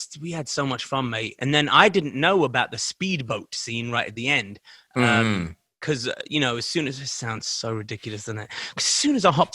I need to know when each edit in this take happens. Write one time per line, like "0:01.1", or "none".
none